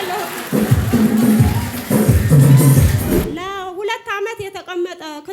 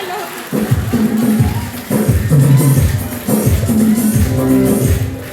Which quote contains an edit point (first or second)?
first